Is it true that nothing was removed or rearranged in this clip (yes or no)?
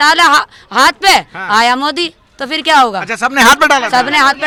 yes